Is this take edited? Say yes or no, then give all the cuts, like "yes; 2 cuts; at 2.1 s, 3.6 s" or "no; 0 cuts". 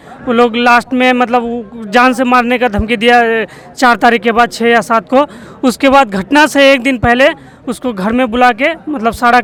no; 0 cuts